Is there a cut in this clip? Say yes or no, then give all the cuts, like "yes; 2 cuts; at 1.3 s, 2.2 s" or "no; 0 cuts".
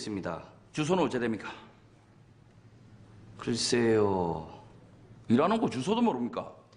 yes; 1 cut; at 1.2 s